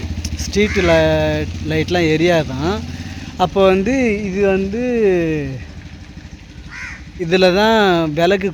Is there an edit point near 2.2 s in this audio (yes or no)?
no